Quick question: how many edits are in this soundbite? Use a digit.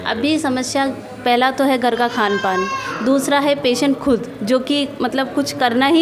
0